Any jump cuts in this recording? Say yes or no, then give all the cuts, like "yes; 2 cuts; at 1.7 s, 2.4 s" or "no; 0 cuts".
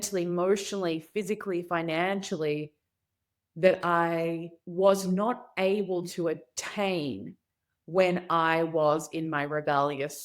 yes; 1 cut; at 4.6 s